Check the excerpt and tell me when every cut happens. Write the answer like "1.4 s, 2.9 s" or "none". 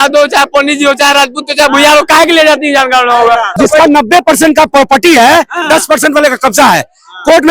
3.5 s